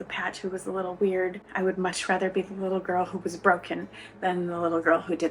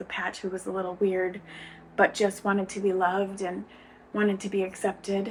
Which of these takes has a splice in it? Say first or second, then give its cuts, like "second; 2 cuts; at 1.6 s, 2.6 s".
first; 1 cut; at 1.4 s